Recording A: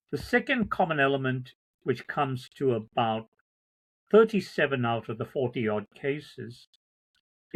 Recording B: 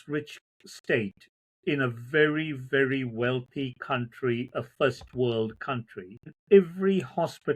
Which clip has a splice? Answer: B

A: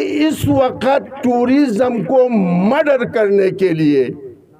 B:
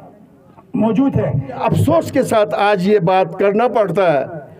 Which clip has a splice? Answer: B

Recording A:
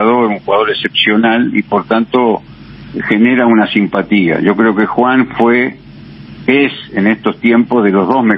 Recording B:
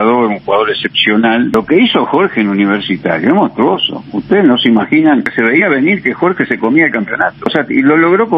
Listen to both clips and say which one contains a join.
B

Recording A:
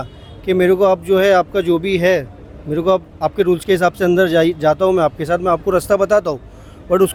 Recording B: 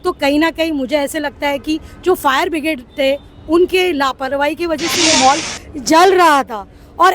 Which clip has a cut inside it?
B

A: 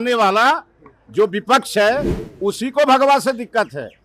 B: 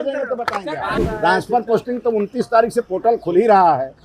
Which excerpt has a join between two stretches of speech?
B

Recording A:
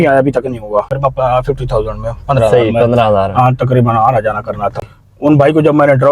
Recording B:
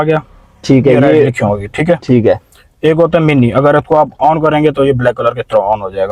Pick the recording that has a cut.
A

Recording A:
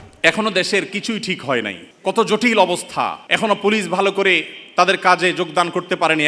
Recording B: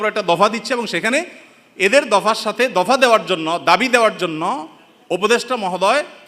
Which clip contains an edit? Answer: A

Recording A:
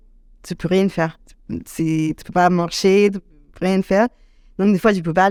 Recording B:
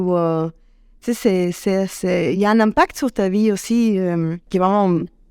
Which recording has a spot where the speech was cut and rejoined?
B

